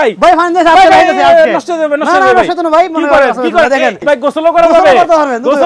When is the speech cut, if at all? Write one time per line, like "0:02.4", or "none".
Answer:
0:04.0